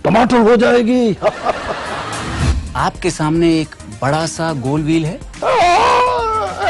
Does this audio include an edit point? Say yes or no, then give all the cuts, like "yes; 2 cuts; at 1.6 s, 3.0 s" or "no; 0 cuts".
yes; 1 cut; at 2.3 s